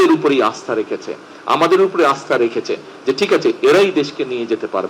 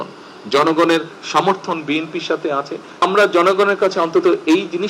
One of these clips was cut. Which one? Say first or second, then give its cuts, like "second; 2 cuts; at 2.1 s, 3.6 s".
second; 1 cut; at 3.0 s